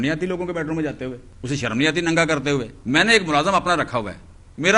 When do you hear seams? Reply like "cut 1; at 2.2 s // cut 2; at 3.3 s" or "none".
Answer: cut 1; at 1.3 s // cut 2; at 2.8 s